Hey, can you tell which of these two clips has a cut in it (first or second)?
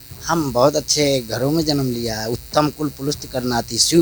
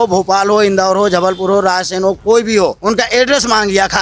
second